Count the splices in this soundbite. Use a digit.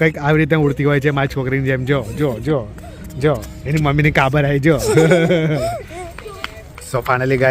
0